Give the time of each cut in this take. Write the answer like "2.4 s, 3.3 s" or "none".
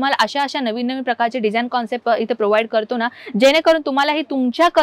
none